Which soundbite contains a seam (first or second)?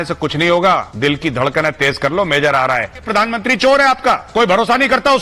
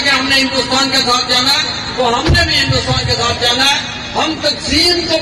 first